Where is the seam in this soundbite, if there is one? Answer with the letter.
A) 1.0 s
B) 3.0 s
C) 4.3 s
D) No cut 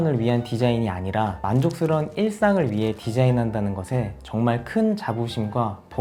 D